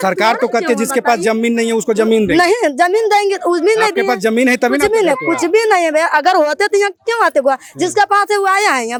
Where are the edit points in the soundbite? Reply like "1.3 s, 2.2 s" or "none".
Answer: none